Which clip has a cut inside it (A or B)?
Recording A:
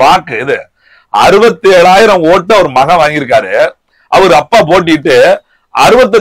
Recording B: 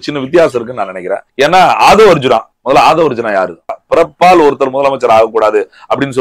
B